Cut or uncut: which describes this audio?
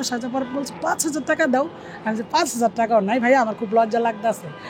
uncut